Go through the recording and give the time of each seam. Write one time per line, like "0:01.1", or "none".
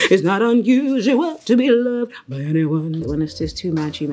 0:03.0